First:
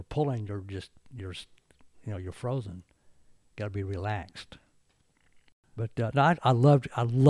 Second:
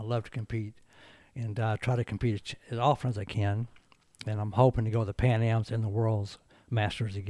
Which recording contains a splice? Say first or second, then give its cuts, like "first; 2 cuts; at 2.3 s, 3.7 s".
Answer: first; 1 cut; at 5.6 s